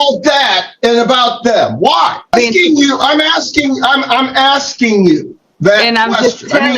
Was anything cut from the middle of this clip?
yes; 1 cut; at 2.3 s

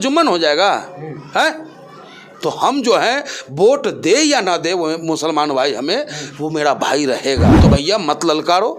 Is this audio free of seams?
no; 1 cut; at 7.6 s

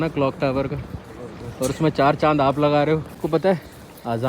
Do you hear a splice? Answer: yes; 1 cut; at 3.1 s

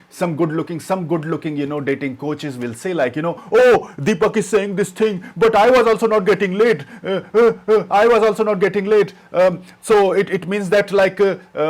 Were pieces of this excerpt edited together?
no; 0 cuts

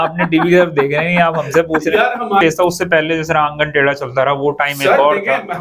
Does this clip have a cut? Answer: yes; 1 cut; at 2.4 s

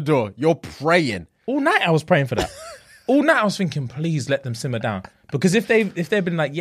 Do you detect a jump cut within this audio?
no; 0 cuts

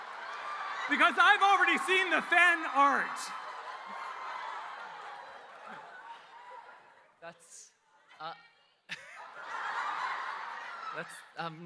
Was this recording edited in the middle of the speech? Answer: no; 0 cuts

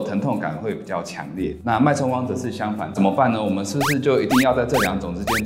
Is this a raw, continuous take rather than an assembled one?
no; 1 cut; at 2.9 s

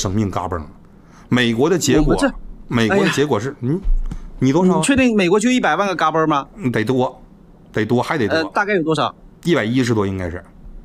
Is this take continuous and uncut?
yes; 0 cuts

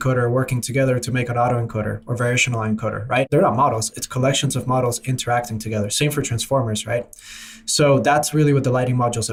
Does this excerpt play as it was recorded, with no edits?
yes; 0 cuts

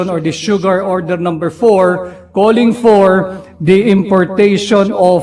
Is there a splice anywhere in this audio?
no; 0 cuts

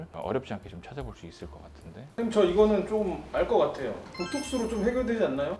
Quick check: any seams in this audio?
no; 0 cuts

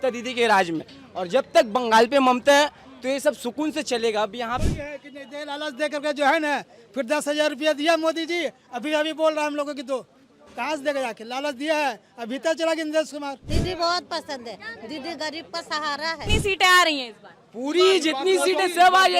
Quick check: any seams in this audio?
yes; 3 cuts; at 4.6 s, 13.5 s, 16.3 s

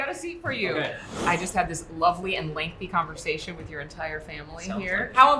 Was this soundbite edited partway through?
no; 0 cuts

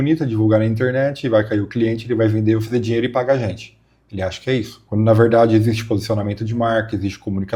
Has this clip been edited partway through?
no; 0 cuts

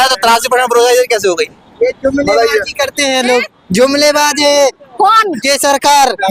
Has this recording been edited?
no; 0 cuts

